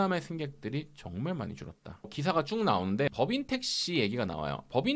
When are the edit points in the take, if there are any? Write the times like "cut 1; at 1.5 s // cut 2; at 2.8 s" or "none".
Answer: cut 1; at 2.1 s // cut 2; at 3.1 s